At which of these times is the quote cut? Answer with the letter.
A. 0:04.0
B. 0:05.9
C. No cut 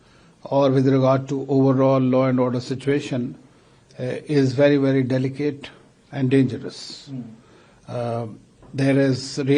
C